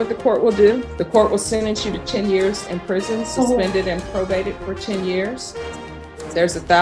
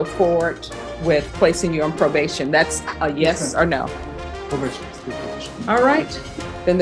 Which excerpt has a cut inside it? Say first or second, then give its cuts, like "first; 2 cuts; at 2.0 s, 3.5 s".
first; 1 cut; at 0.9 s